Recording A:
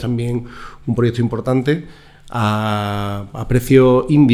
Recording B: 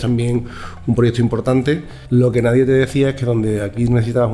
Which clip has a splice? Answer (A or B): B